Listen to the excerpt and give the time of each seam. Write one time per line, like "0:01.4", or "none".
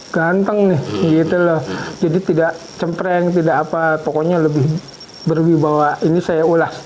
none